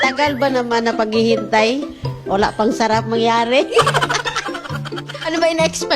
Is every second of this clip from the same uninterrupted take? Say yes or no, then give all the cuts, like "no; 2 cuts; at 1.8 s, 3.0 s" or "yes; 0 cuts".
yes; 0 cuts